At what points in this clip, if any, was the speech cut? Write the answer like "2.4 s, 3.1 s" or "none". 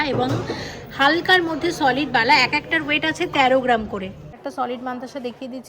4.3 s